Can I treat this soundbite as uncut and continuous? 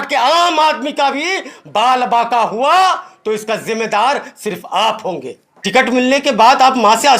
no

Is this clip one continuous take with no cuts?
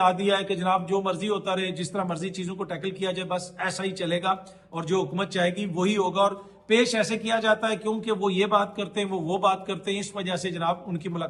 yes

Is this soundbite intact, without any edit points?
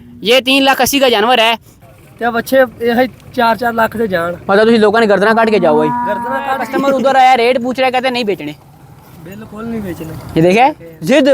no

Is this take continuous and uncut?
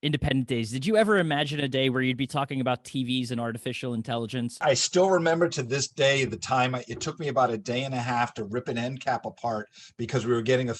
no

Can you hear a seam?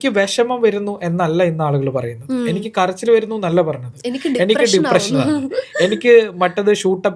no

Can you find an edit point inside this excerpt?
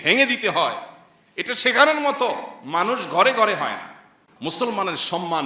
yes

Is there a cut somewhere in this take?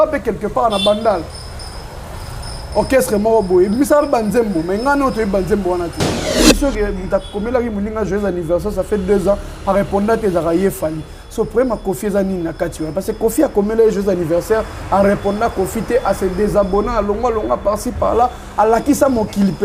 yes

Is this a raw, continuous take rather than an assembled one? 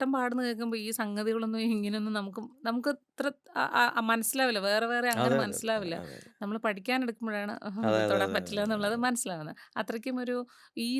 yes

